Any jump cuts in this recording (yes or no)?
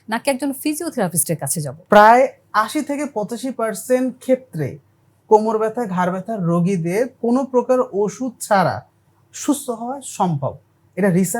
yes